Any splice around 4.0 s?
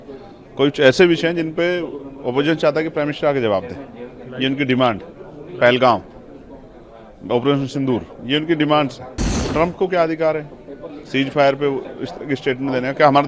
no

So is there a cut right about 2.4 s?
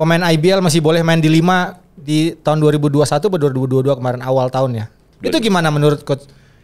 no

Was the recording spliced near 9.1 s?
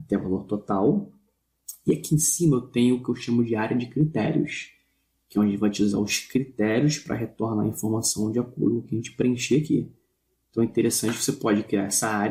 no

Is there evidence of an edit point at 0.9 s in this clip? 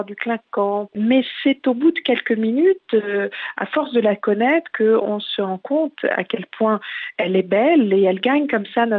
yes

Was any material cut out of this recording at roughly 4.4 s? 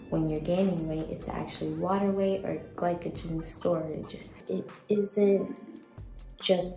yes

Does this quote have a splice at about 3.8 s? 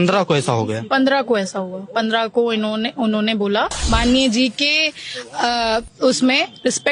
yes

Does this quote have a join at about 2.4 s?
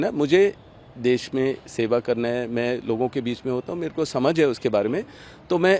no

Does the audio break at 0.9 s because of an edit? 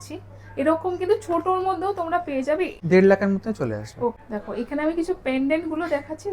no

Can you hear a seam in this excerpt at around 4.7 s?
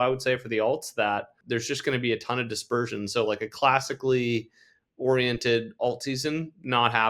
no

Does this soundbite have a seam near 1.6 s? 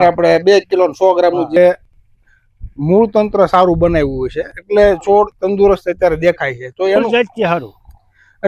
yes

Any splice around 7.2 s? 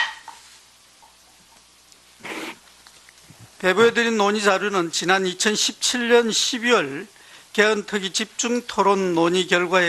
no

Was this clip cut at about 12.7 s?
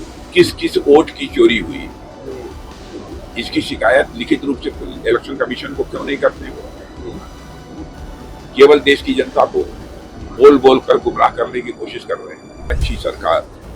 yes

